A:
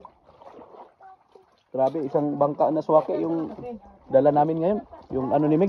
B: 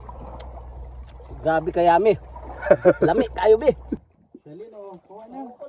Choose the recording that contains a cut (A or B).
B